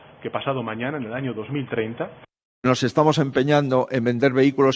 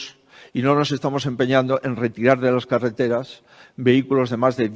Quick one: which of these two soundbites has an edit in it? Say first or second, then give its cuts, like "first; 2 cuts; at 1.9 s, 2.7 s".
first; 1 cut; at 2.4 s